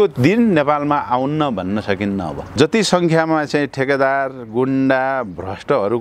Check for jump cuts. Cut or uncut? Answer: cut